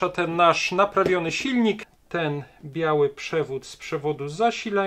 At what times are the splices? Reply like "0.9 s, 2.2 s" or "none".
1.8 s